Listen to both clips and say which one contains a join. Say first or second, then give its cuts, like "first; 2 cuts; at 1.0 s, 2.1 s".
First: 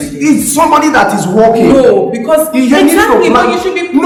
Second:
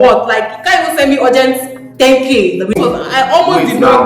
second; 1 cut; at 2.8 s